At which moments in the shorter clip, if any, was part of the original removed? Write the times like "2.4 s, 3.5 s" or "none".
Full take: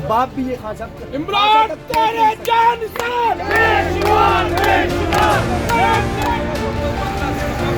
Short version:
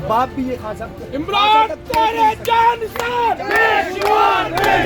none